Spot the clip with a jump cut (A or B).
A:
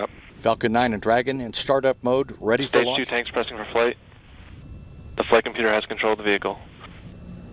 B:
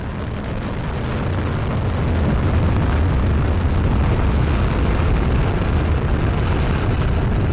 A